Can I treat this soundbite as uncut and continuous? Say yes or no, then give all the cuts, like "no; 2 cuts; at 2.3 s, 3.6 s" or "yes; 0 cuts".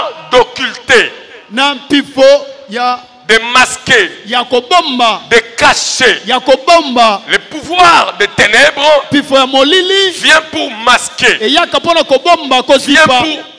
yes; 0 cuts